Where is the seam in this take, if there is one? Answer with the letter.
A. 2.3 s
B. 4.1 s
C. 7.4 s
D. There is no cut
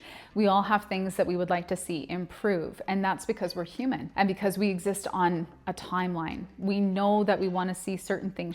B